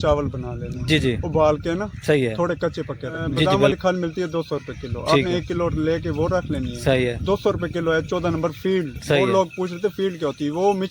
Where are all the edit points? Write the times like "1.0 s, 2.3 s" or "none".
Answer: 3.5 s